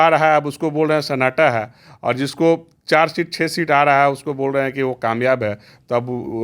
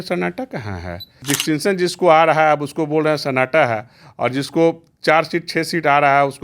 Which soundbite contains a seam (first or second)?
second